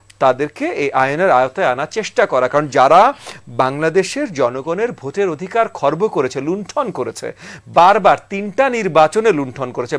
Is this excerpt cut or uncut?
uncut